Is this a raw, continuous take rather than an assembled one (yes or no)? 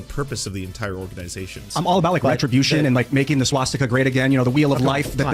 no